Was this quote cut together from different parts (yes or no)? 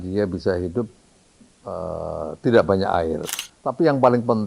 yes